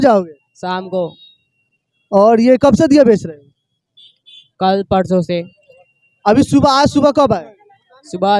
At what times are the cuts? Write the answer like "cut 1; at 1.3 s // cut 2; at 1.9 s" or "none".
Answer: none